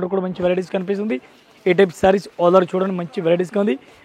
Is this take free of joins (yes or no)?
yes